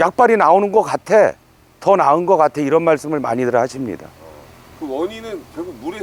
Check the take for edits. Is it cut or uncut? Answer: uncut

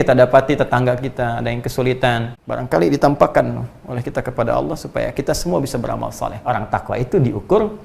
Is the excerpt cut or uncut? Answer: cut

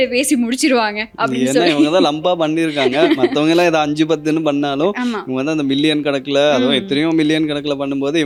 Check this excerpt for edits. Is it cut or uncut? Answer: uncut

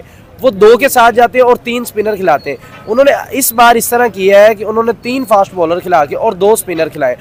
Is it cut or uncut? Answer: uncut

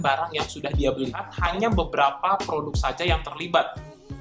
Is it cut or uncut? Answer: cut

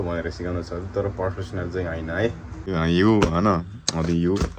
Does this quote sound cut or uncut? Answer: cut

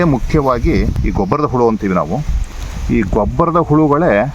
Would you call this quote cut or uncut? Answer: cut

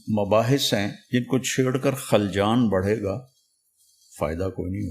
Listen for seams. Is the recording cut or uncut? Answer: cut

